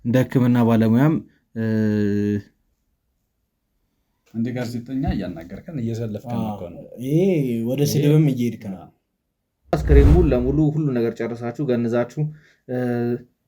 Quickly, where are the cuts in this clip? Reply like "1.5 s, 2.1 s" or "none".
9.7 s

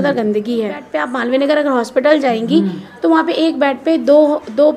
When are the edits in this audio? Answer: 0.9 s

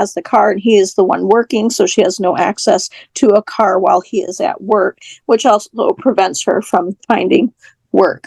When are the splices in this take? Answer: none

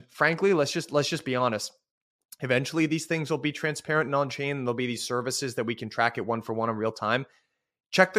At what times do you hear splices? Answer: none

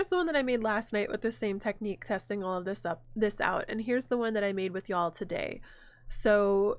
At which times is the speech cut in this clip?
none

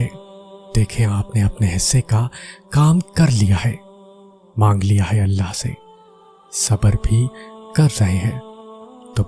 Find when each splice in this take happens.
none

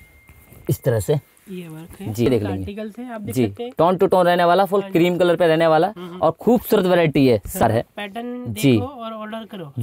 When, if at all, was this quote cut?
2.3 s, 7.6 s

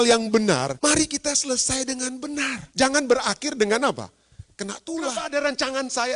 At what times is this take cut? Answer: 0.7 s, 2.6 s, 5.1 s

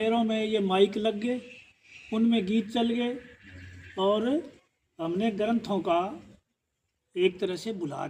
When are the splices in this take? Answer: none

